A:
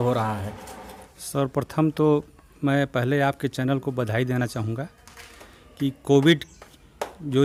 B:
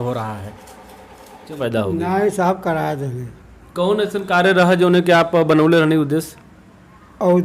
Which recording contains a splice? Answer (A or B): B